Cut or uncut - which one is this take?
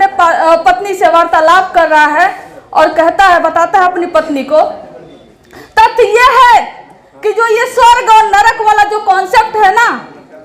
uncut